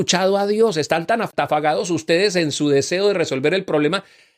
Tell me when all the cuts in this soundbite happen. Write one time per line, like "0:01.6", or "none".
0:01.3